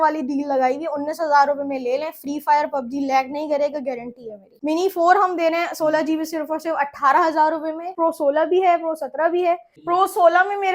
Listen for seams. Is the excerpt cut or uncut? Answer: cut